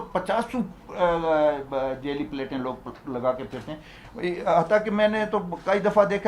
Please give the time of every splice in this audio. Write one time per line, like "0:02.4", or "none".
none